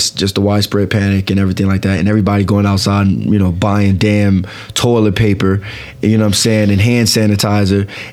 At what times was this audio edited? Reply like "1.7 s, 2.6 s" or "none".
none